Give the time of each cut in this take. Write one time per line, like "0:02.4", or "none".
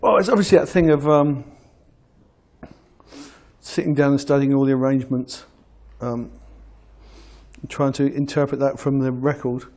0:01.2